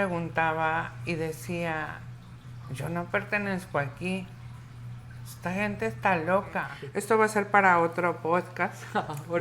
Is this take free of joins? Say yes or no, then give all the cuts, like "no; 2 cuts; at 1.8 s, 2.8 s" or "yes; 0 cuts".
no; 1 cut; at 6.8 s